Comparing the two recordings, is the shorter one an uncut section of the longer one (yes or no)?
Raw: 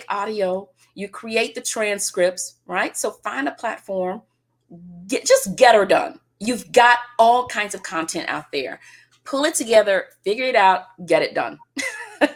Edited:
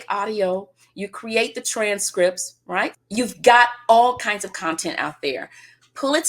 no